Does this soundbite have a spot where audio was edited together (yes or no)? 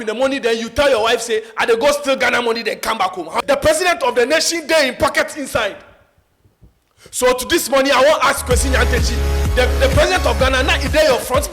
yes